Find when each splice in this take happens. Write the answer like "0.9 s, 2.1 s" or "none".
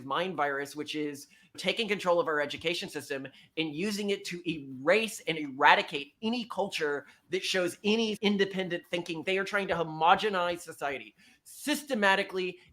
8.2 s, 9.2 s